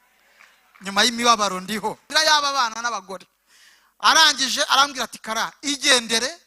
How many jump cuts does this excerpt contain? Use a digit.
1